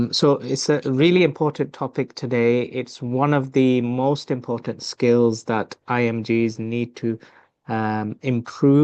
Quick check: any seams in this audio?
no; 0 cuts

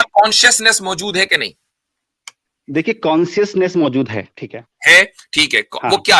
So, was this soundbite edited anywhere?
no; 0 cuts

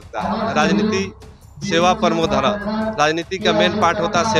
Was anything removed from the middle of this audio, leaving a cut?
no; 0 cuts

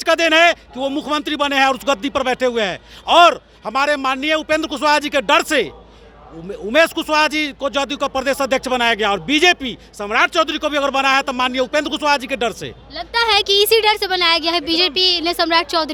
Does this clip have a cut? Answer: no; 0 cuts

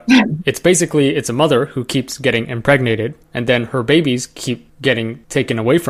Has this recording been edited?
no; 0 cuts

